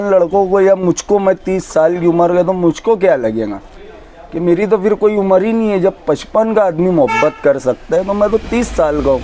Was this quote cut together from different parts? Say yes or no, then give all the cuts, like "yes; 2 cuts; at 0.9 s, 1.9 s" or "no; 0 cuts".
no; 0 cuts